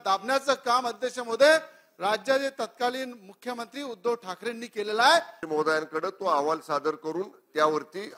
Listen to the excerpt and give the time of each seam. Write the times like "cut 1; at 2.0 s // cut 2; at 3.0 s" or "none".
cut 1; at 5.4 s